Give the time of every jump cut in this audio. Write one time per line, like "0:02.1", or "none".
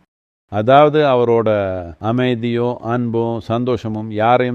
0:01.9